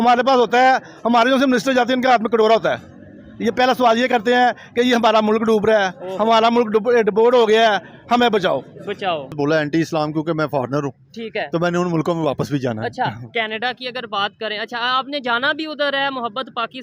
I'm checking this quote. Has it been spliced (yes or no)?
yes